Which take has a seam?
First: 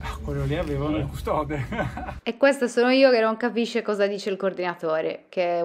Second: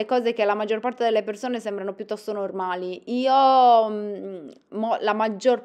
first; 1 cut; at 2.1 s

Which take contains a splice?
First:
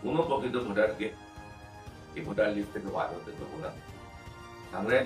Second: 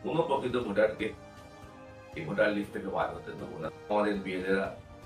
second; 1 cut; at 3.9 s

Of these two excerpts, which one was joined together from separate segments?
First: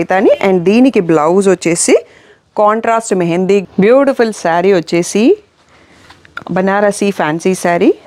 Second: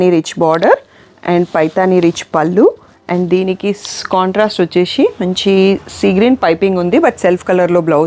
first; 1 cut; at 3.6 s

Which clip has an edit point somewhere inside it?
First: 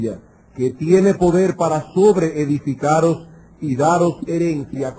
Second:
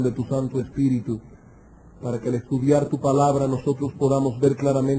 first; 1 cut; at 1.9 s

